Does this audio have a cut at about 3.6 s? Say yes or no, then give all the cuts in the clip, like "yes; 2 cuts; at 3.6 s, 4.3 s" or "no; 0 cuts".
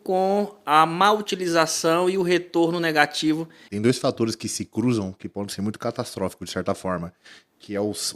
yes; 1 cut; at 3.6 s